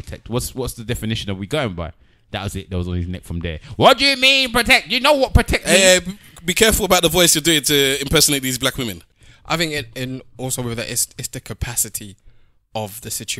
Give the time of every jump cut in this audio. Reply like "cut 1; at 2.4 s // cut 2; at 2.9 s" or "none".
cut 1; at 9.0 s